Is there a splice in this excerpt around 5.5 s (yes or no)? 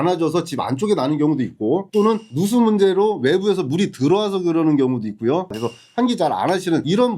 yes